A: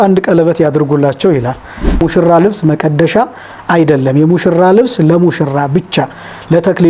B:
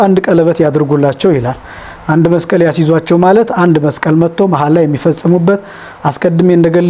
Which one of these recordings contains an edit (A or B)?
A